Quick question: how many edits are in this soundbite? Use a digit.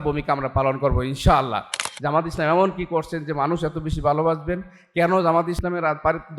1